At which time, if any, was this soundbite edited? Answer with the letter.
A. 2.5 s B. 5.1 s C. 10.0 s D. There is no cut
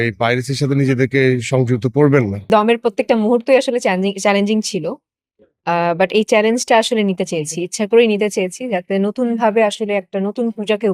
A